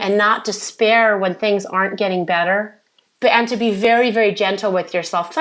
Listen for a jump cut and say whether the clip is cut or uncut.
cut